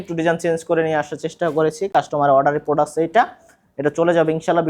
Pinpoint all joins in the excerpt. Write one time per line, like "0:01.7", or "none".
none

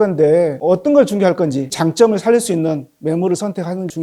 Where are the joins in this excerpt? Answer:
0:01.7

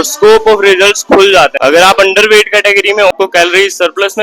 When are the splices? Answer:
0:01.6
0:03.1

